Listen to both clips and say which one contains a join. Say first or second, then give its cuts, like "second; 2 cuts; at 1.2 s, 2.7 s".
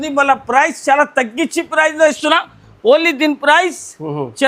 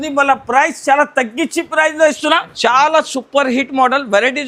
second; 1 cut; at 2.5 s